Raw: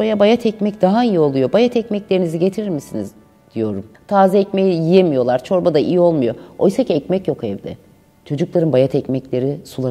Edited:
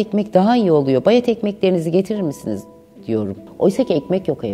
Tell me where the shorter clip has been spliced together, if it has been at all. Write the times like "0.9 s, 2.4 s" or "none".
3.4 s